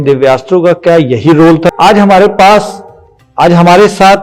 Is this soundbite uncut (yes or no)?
no